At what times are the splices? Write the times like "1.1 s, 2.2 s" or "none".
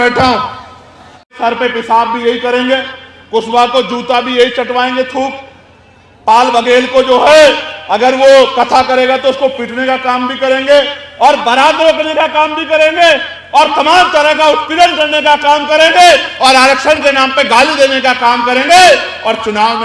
1.4 s